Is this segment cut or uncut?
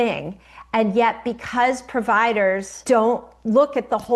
cut